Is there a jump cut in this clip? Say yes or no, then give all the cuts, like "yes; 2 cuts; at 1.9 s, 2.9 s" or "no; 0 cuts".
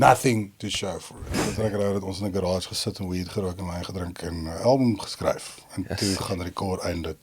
yes; 1 cut; at 1.4 s